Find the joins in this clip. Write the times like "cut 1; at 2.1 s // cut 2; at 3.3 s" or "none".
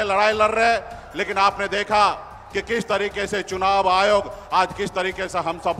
none